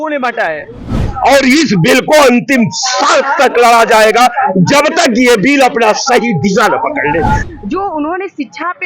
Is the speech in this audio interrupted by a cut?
yes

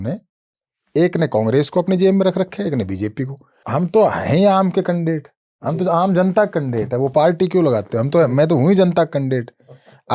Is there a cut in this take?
yes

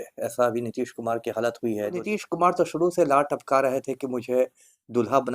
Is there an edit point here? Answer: yes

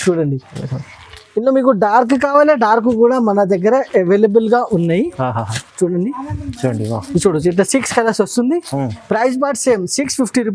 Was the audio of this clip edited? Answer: no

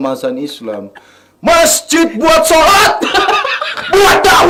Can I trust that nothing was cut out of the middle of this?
yes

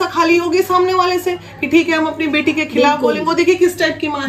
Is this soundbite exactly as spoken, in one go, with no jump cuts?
yes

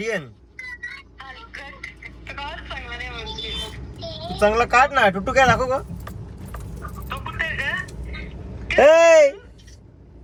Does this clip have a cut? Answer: no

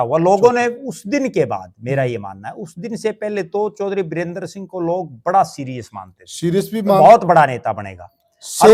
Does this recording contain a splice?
no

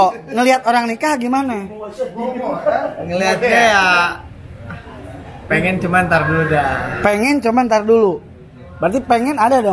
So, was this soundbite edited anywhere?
no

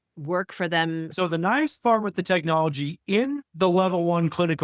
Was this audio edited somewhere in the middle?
yes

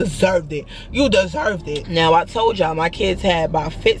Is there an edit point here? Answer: yes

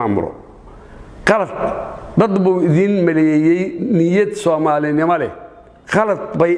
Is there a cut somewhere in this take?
no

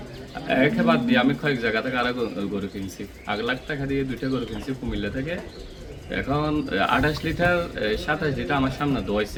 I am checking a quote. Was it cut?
no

